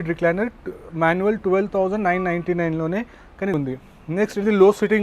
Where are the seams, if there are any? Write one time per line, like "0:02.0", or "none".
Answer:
0:03.5